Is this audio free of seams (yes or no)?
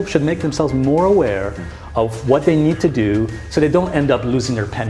yes